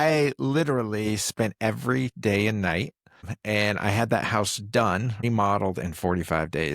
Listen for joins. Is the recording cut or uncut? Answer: cut